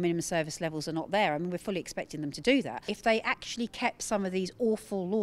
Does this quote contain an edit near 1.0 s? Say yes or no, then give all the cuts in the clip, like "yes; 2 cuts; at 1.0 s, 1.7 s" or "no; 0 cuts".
no; 1 cut; at 2.8 s